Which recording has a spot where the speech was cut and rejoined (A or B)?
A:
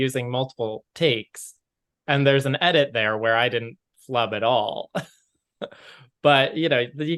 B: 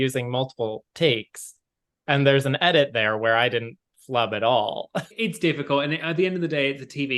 B